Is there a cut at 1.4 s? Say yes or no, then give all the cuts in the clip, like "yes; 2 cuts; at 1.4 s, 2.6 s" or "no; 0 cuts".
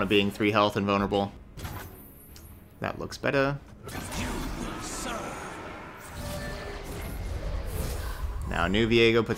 yes; 2 cuts; at 1.4 s, 3.7 s